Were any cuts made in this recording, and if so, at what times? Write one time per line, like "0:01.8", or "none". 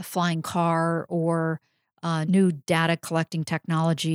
0:02.2